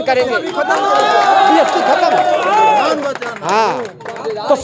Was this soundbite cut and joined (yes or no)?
no